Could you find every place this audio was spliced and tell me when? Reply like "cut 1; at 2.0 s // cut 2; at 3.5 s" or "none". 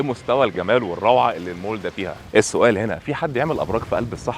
cut 1; at 2.1 s